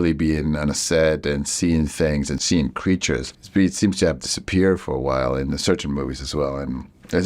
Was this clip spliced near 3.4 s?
yes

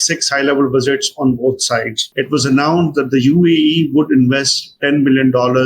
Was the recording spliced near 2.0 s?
yes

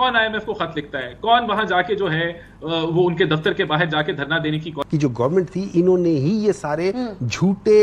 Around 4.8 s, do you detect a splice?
yes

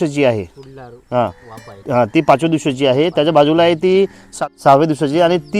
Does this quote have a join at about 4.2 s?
yes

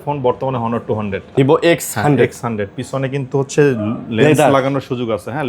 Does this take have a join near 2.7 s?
no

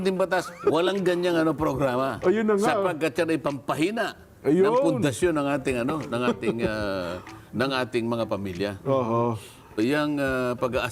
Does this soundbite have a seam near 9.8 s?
yes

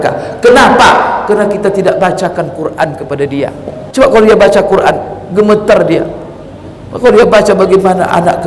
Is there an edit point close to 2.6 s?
no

